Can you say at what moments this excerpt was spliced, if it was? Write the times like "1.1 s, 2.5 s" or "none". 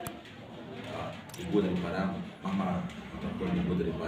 none